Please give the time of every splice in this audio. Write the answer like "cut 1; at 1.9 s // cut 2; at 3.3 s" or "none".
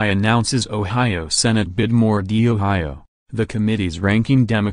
cut 1; at 1.8 s